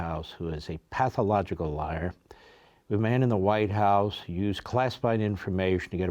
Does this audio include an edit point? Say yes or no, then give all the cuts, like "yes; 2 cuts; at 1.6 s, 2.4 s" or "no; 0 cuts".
no; 0 cuts